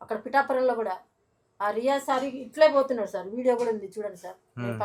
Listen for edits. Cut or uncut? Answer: uncut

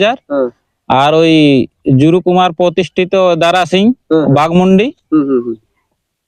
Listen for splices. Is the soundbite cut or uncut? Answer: uncut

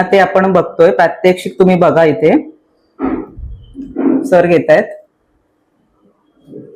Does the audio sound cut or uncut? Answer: uncut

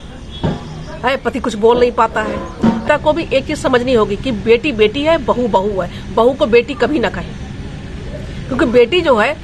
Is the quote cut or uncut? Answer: cut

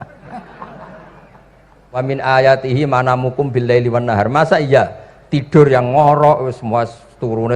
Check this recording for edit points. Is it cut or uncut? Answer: cut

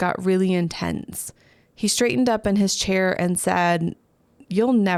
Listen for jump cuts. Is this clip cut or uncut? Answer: uncut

